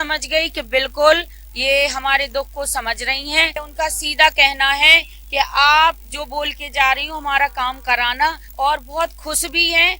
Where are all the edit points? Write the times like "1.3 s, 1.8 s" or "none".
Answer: 3.6 s, 8.4 s